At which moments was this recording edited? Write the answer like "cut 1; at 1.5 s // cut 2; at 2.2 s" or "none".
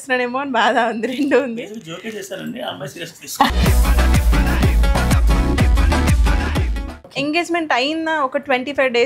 cut 1; at 7.1 s